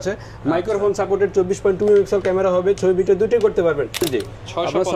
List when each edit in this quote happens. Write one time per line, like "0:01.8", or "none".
0:04.1